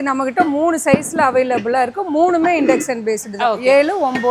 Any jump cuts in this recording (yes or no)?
no